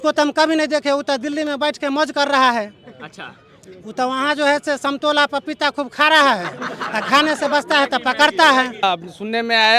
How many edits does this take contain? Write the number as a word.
one